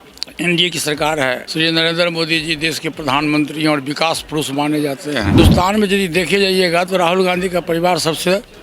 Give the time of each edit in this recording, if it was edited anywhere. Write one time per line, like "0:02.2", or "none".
0:01.4
0:05.4